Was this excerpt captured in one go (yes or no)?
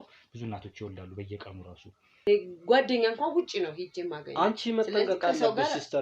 no